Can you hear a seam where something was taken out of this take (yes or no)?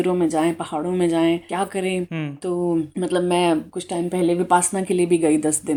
no